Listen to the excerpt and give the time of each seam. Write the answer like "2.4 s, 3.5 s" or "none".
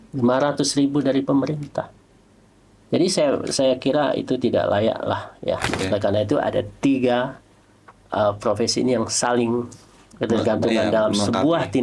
5.7 s